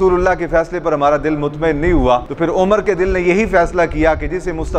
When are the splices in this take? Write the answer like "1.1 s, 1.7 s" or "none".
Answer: none